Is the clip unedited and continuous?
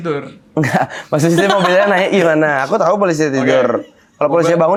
yes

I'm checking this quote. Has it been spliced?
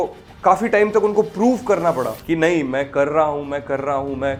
no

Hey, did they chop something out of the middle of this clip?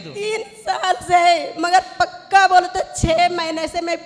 no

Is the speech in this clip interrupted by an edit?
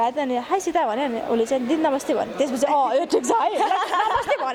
no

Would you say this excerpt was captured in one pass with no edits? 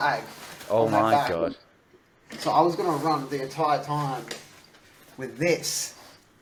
yes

